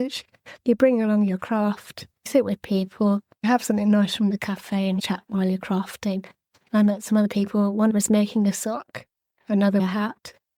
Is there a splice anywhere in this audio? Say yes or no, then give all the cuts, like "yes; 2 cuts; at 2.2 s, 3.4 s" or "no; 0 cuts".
no; 0 cuts